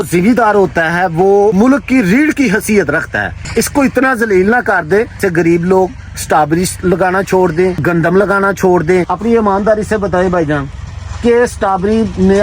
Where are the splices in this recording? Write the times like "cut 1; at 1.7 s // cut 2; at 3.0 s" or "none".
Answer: cut 1; at 1.5 s // cut 2; at 3.4 s // cut 3; at 5.2 s // cut 4; at 7.8 s // cut 5; at 9.1 s